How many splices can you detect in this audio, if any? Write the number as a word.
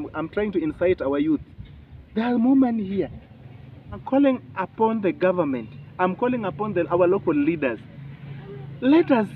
one